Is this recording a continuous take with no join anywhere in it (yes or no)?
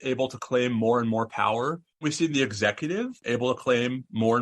no